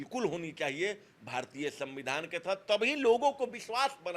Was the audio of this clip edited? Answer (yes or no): no